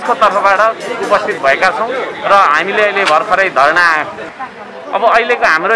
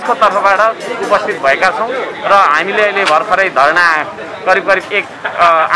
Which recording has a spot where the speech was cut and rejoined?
first; 1 cut; at 4.3 s

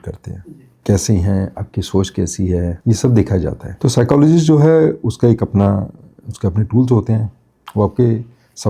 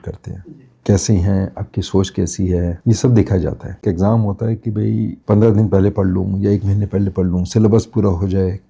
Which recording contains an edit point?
second; 1 cut; at 3.8 s

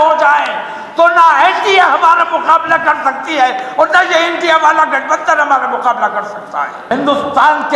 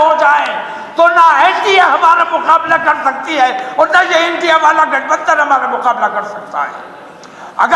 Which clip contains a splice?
first; 1 cut; at 6.8 s

